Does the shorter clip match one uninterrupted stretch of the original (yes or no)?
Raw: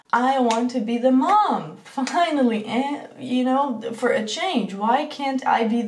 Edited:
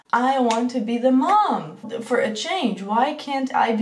no